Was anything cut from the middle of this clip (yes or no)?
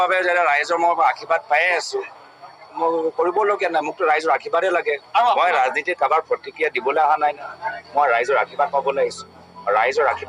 no